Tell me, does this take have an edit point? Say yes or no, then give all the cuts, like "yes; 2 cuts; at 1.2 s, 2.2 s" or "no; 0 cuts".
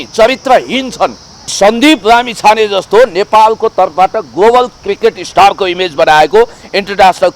yes; 1 cut; at 1.5 s